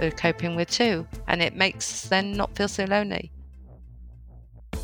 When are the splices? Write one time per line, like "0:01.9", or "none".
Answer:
0:03.3